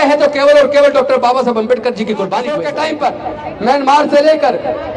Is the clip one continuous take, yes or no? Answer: no